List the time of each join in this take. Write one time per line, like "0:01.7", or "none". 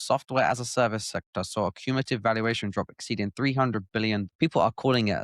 0:04.2